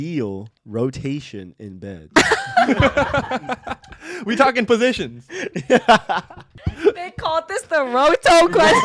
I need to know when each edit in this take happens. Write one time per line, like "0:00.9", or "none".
none